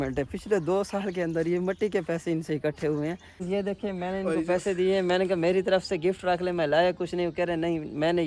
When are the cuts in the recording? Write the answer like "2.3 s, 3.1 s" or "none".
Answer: 3.3 s